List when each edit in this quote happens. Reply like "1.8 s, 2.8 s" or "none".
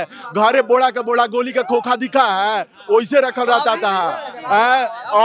none